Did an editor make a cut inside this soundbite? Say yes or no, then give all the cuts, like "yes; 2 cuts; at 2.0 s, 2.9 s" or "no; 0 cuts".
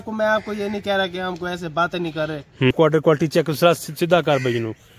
yes; 1 cut; at 2.7 s